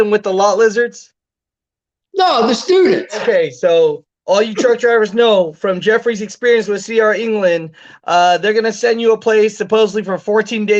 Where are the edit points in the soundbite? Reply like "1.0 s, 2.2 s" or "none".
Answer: 3.2 s